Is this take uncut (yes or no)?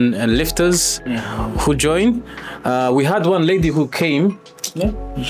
yes